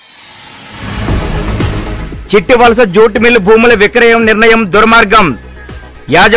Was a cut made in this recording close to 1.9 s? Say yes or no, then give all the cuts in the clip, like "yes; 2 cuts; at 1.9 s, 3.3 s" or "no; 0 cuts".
yes; 1 cut; at 1.9 s